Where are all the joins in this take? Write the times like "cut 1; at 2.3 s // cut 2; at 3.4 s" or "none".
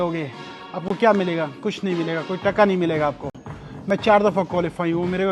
none